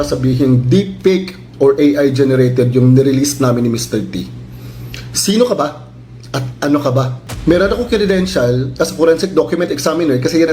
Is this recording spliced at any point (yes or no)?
yes